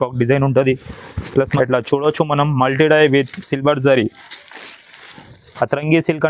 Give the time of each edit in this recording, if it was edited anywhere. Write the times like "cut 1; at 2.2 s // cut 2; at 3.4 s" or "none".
cut 1; at 1.5 s